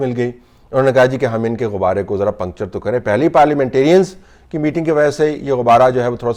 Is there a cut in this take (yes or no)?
no